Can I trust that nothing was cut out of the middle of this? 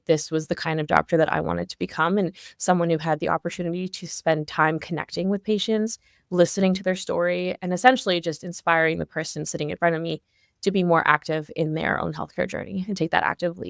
yes; 0 cuts

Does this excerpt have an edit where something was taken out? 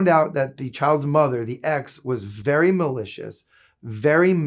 no; 0 cuts

